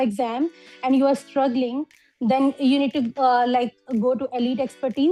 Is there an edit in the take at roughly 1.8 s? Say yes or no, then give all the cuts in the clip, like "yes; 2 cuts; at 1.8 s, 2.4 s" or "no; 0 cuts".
no; 0 cuts